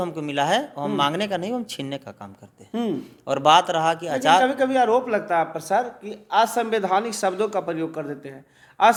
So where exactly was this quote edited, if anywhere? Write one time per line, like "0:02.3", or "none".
none

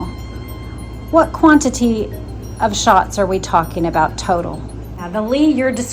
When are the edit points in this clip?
0:05.0

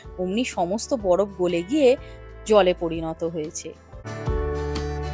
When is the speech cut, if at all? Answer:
0:04.0

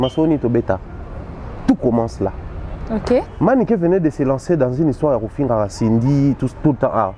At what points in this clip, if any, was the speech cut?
0:03.3

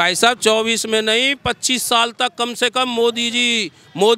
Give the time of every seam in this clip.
none

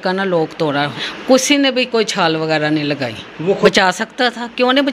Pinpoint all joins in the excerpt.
0:01.1
0:03.7

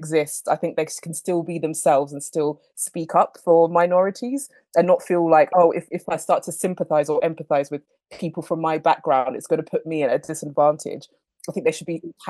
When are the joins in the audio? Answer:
0:05.9

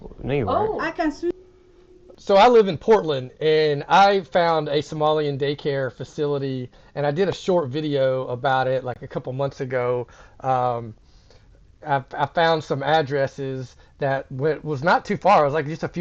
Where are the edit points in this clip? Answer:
none

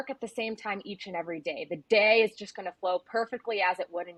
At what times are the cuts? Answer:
none

